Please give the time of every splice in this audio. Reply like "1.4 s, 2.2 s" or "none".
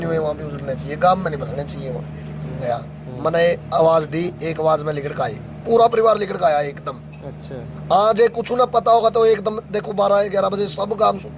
2.6 s